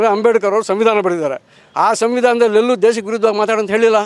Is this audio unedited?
yes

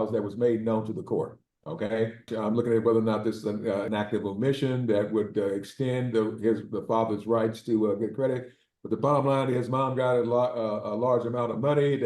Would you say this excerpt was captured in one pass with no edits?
no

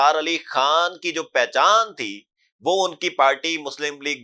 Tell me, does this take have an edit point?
no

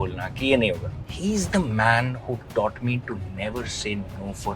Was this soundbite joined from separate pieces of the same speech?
yes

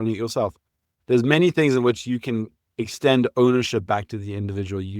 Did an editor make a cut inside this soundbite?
no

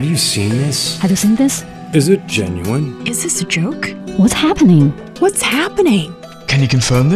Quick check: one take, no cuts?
no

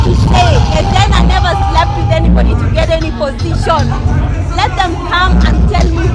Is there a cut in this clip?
no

